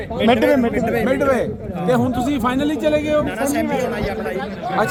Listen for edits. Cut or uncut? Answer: uncut